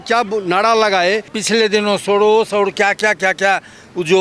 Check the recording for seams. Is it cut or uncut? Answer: cut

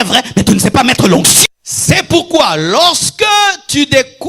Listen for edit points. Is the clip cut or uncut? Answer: cut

